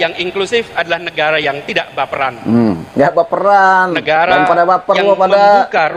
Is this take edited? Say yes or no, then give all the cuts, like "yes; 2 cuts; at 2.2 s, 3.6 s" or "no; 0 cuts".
no; 0 cuts